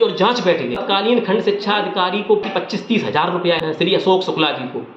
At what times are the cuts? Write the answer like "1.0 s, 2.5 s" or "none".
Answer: 0.8 s, 2.5 s, 3.6 s